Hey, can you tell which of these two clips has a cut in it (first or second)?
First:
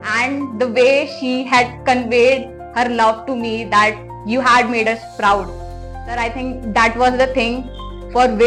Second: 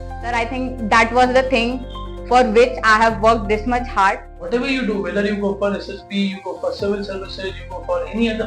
second